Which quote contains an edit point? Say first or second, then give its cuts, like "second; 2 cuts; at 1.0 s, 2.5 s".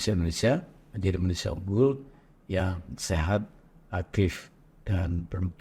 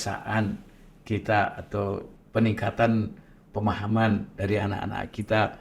second; 1 cut; at 2.1 s